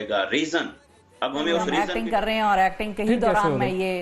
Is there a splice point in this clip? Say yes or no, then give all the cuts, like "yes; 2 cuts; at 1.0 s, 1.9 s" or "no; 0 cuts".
yes; 1 cut; at 1.9 s